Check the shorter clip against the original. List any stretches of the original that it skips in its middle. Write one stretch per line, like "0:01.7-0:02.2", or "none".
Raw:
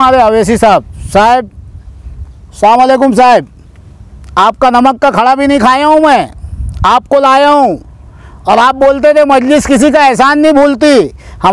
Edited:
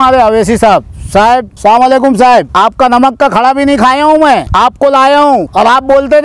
0:01.5-0:02.5
0:03.5-0:04.3
0:06.3-0:06.8
0:07.8-0:08.4